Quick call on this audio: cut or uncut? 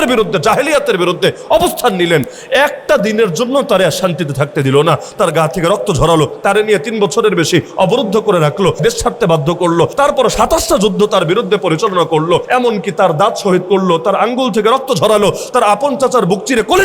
cut